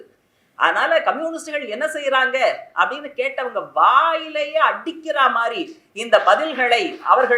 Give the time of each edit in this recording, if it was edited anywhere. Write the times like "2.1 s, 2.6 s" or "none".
none